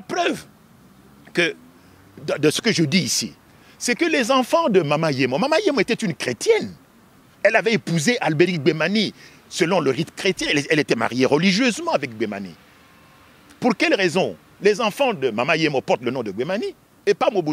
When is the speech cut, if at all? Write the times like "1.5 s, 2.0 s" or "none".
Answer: none